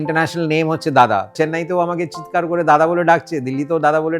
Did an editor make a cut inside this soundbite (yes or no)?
yes